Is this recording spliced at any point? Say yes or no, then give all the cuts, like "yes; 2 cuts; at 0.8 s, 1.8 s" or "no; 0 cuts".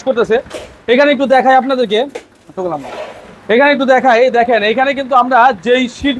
no; 0 cuts